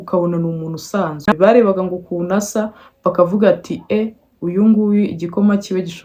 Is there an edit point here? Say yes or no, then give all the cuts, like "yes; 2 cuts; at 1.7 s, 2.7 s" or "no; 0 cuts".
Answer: yes; 1 cut; at 1.3 s